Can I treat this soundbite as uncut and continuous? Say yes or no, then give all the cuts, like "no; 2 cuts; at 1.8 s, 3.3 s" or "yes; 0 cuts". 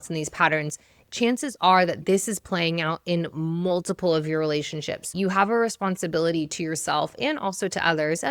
no; 2 cuts; at 2.0 s, 5.1 s